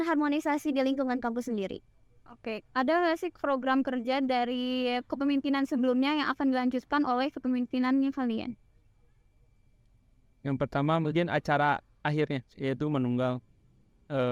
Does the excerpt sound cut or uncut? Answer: uncut